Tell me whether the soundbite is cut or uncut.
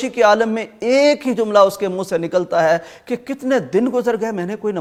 uncut